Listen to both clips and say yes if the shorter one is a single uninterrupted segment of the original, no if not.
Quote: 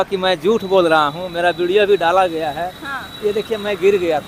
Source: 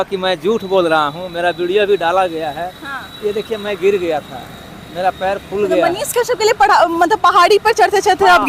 yes